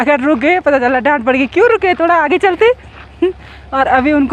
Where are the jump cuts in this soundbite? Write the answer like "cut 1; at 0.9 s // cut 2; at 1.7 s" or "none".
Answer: none